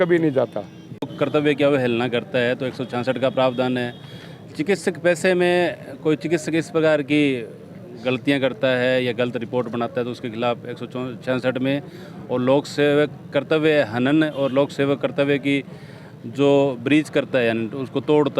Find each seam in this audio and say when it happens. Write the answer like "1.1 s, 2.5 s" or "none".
1.1 s